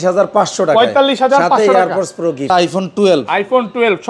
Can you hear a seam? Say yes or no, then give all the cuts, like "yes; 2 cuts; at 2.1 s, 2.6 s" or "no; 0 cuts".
yes; 1 cut; at 2.5 s